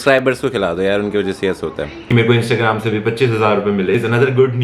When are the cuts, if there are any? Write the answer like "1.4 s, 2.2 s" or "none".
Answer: 2.0 s, 3.9 s